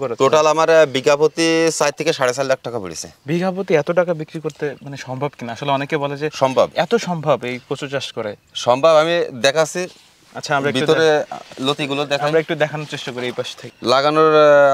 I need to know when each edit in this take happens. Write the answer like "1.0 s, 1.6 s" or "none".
13.6 s

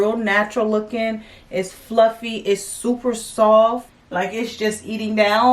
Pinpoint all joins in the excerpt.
4.0 s

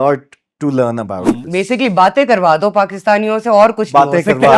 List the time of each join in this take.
1.4 s

